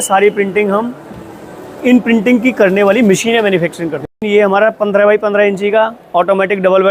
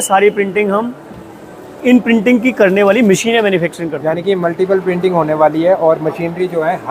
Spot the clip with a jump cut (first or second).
first